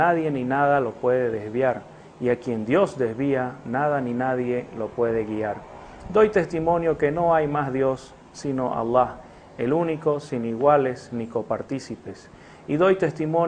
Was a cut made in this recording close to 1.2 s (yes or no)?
yes